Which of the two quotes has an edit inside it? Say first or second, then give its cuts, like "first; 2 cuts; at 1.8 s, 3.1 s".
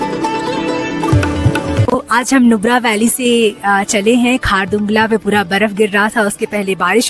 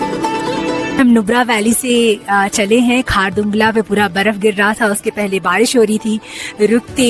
second; 1 cut; at 1.0 s